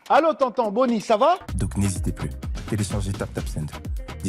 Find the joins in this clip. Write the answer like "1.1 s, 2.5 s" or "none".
1.4 s